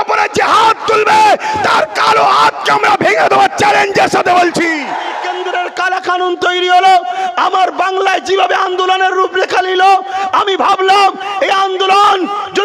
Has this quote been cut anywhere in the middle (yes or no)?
yes